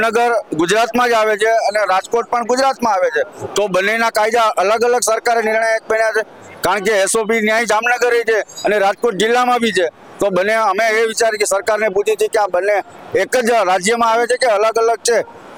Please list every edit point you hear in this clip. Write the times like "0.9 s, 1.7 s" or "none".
none